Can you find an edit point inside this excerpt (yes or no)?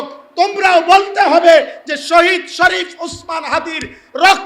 no